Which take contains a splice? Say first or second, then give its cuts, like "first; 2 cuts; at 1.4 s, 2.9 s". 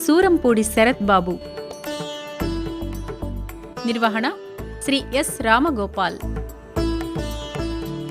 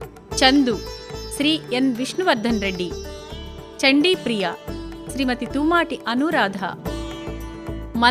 first; 3 cuts; at 1.5 s, 3.6 s, 6.3 s